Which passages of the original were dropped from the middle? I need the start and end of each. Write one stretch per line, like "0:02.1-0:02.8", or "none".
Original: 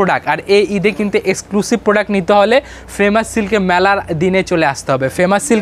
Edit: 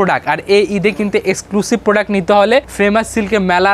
0:02.7-0:02.9